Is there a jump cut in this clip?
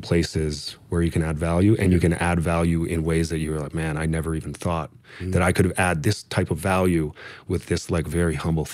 no; 0 cuts

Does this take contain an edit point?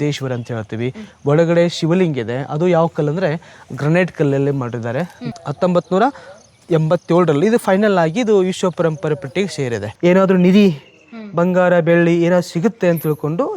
yes; 2 cuts; at 5.2 s, 9.8 s

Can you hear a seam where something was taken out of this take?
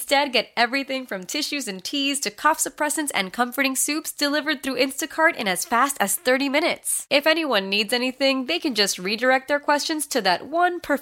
no; 0 cuts

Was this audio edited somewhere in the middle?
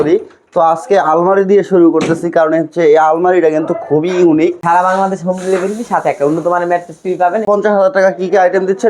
yes; 2 cuts; at 4.6 s, 7.5 s

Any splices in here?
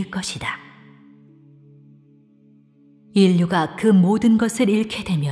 yes; 1 cut; at 3.8 s

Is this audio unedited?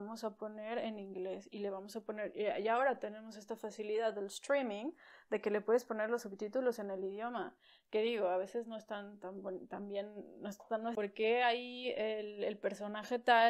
no; 1 cut; at 11.0 s

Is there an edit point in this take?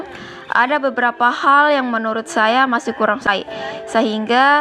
yes; 1 cut; at 3.3 s

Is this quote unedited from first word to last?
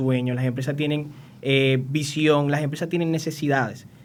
yes; 0 cuts

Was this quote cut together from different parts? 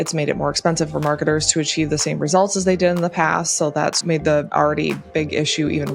yes; 1 cut; at 4.4 s

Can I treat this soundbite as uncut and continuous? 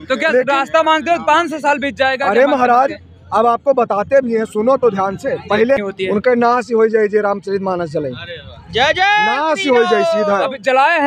no; 1 cut; at 5.8 s

